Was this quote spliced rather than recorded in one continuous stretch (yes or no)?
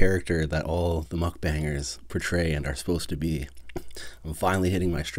no